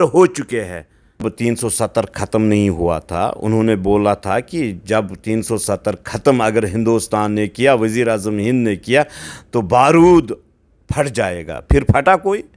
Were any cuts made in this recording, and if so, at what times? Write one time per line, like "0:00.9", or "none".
0:01.3

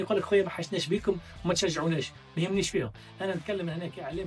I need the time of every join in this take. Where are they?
none

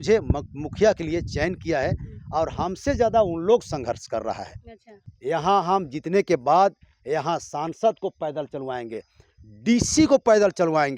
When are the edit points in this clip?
0:05.0

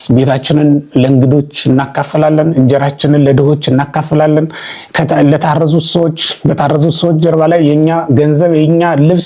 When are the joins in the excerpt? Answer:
none

